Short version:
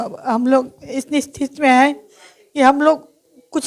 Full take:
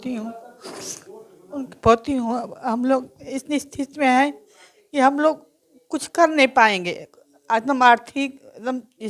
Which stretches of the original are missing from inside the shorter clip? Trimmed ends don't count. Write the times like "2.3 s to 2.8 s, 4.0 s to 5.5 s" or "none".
none